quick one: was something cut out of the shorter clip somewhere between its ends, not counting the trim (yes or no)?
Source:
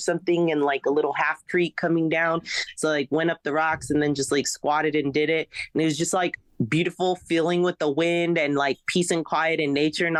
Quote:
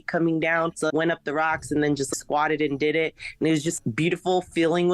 yes